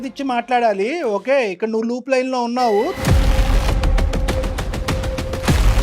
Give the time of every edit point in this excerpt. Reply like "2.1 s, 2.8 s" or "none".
2.9 s